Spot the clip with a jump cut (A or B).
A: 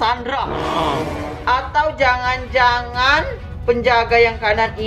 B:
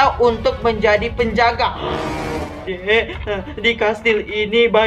B